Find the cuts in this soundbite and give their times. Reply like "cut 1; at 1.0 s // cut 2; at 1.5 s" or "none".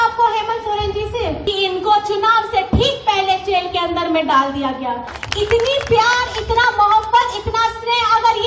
cut 1; at 1.4 s // cut 2; at 5.2 s